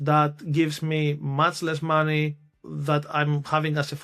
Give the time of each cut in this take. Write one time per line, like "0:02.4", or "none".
0:02.5

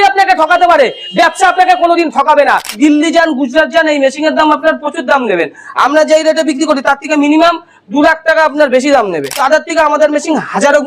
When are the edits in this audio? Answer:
0:02.7
0:09.3

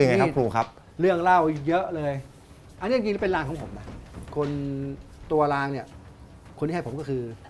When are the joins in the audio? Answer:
none

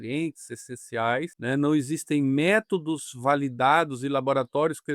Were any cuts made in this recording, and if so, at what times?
0:01.3

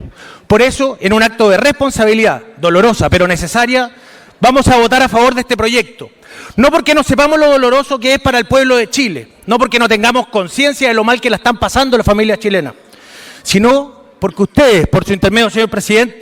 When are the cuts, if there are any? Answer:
none

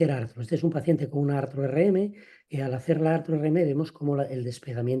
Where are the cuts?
none

